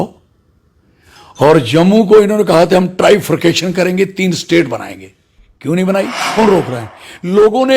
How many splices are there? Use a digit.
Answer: 1